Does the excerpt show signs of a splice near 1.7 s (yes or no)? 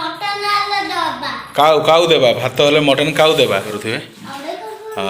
no